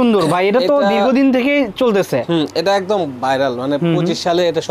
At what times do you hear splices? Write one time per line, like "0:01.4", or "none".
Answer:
none